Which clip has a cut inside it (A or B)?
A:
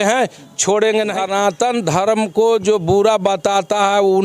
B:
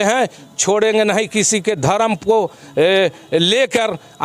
A